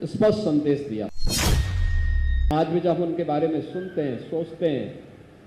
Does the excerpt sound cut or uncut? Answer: cut